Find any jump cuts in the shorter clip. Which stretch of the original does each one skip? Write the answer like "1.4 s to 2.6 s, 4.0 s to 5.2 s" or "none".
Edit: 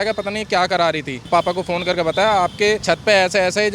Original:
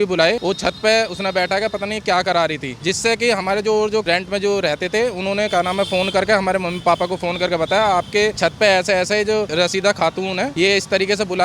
2.7 s to 6.7 s